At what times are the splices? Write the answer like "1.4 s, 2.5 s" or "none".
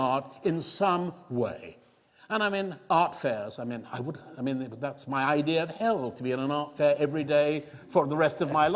none